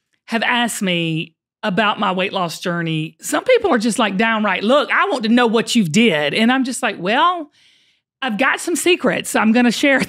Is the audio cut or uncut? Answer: cut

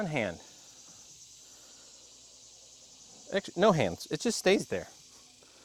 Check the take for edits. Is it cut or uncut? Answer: uncut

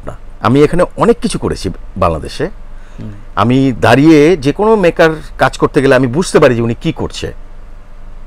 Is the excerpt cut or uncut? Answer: uncut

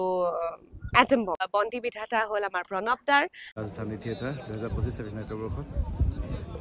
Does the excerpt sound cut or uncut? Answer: cut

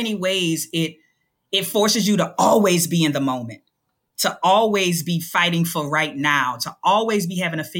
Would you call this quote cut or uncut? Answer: uncut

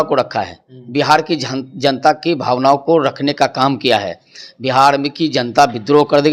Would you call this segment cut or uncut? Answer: uncut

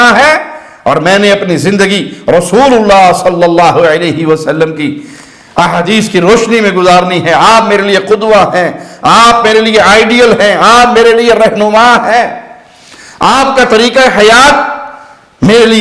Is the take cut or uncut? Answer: uncut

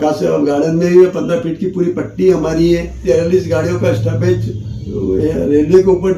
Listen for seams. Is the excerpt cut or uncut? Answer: cut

